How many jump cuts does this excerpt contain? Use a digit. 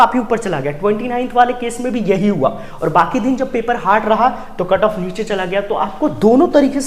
0